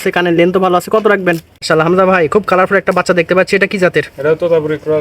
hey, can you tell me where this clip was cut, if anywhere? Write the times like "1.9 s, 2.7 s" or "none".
1.6 s